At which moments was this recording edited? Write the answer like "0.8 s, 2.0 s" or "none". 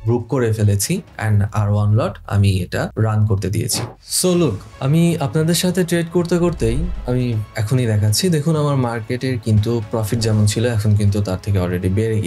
3.9 s